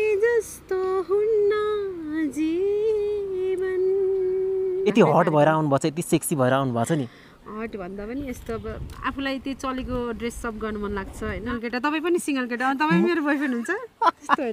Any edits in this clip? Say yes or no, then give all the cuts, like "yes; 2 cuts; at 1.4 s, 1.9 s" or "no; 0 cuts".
yes; 2 cuts; at 4.8 s, 11.5 s